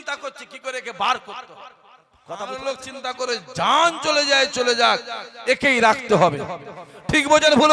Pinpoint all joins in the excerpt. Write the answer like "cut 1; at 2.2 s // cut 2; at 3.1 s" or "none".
cut 1; at 2.4 s